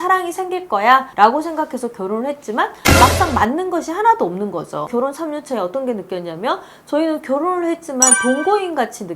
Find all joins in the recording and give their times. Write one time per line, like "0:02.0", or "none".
0:01.1
0:04.9